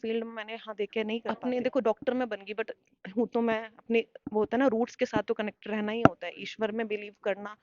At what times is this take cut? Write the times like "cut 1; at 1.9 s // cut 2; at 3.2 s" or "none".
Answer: cut 1; at 1.2 s